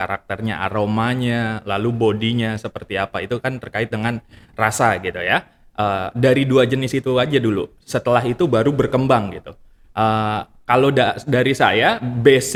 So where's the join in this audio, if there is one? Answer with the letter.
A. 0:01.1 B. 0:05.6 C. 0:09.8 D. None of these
D